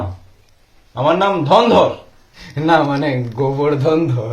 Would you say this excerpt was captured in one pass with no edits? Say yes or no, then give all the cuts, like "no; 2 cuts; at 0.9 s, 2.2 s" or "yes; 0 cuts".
no; 1 cut; at 2.2 s